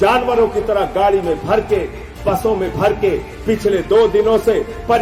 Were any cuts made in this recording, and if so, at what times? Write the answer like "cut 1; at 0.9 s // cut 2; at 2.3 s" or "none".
none